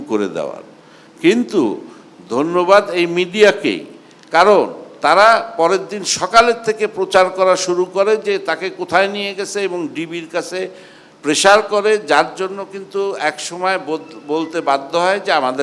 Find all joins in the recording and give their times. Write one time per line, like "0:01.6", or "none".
none

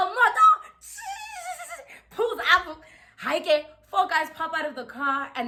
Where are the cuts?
none

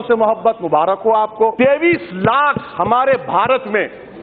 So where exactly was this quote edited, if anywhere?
0:01.5

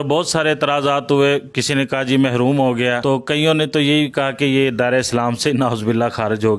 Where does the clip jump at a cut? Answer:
0:03.0

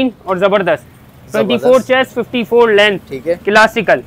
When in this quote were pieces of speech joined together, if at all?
none

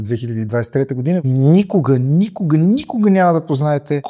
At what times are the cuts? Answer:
0:01.2

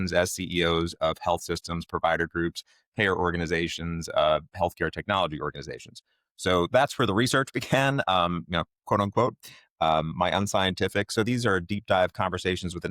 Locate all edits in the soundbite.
none

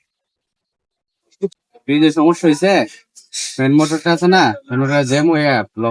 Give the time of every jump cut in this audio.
0:01.5

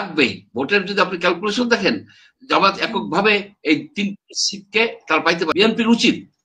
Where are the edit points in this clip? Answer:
0:05.5

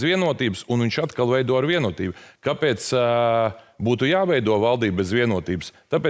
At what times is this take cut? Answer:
none

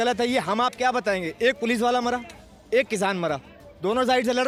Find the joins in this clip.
none

